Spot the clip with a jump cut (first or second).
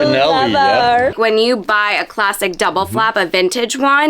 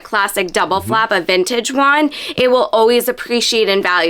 first